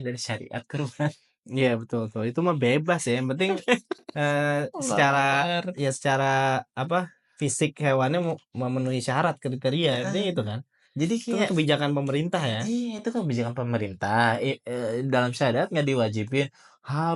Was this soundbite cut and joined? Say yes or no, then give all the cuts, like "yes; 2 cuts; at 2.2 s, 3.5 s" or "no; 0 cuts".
no; 0 cuts